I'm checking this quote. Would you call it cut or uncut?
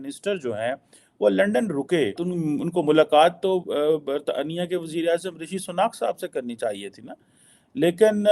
cut